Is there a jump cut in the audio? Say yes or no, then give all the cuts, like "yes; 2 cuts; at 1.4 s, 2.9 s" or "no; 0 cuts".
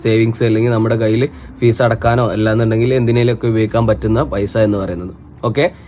no; 0 cuts